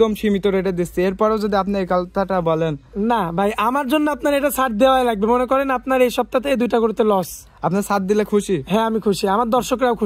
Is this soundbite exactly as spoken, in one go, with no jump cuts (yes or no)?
yes